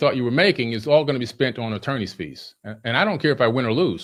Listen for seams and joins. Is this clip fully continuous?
yes; 0 cuts

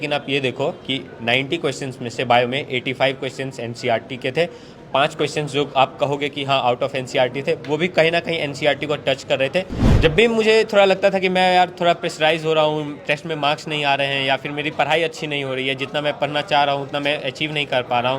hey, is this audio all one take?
no; 1 cut; at 9.8 s

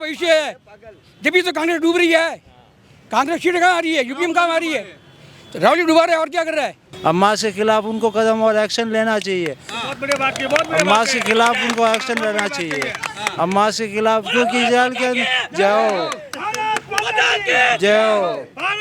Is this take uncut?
no; 1 cut; at 6.8 s

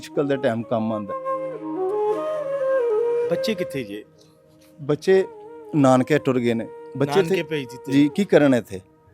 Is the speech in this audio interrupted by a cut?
yes; 1 cut; at 3.1 s

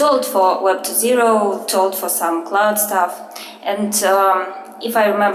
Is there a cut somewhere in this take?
no; 0 cuts

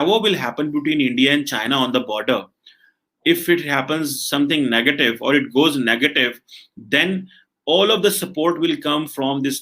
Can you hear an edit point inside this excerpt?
no; 0 cuts

